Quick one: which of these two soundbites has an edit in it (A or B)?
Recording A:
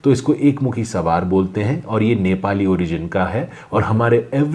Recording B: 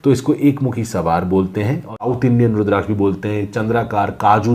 B